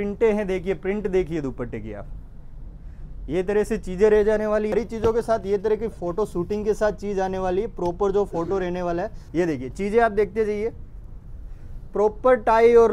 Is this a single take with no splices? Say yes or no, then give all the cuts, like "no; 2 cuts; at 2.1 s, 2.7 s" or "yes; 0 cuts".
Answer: no; 2 cuts; at 4.7 s, 9.2 s